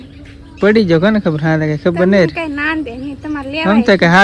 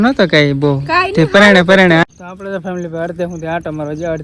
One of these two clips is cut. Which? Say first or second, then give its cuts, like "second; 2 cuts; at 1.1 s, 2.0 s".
second; 1 cut; at 2.0 s